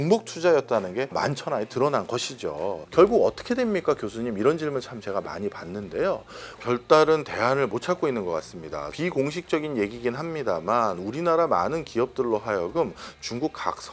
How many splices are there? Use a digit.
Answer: 1